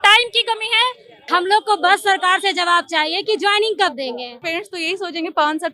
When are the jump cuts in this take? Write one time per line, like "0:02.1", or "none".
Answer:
0:01.1
0:04.4

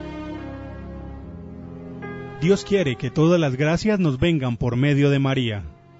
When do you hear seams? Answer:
0:02.4

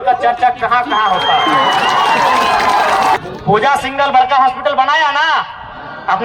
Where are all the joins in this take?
0:03.2

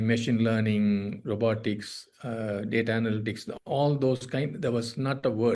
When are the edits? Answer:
none

